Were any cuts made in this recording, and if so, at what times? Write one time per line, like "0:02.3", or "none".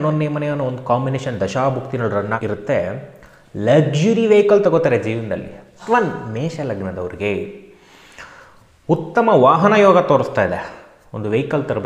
0:02.4
0:05.8